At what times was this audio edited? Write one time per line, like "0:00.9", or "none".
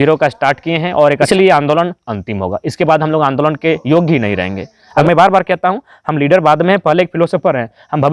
0:01.3
0:04.8